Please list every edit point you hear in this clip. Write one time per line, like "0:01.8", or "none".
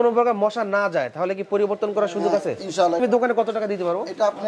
0:03.0